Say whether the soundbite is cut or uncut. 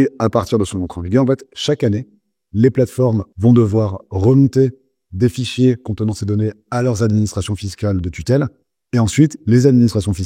cut